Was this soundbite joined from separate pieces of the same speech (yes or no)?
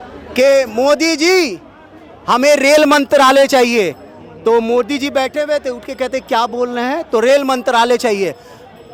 no